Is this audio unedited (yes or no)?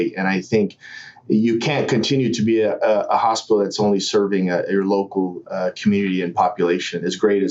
yes